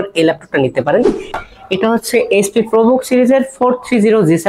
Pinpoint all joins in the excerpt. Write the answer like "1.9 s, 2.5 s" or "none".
1.3 s